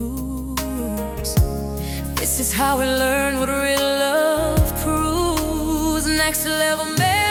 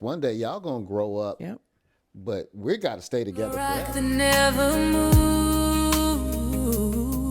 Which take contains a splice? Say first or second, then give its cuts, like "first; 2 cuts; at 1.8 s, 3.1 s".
second; 2 cuts; at 1.4 s, 3.5 s